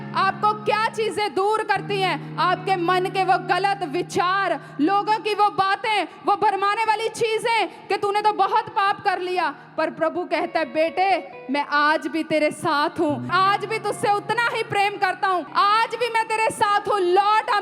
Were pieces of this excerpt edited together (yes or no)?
yes